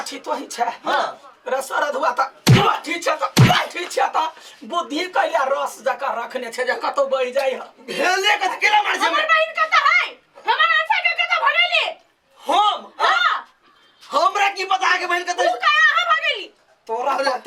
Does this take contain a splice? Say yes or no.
no